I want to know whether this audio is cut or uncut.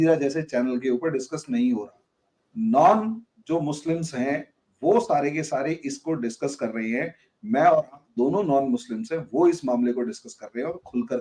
uncut